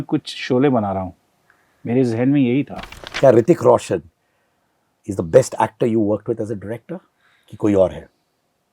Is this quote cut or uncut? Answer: cut